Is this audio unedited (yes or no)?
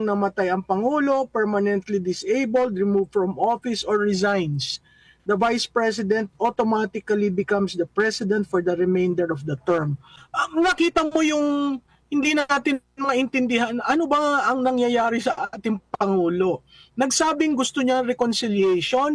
no